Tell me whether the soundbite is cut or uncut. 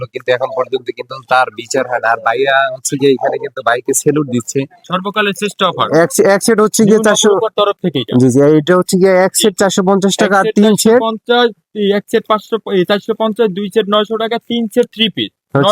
cut